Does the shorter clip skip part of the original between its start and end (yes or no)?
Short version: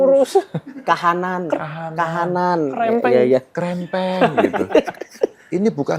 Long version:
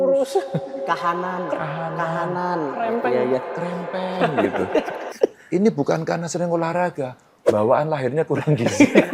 no